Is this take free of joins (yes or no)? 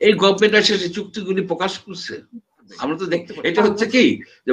no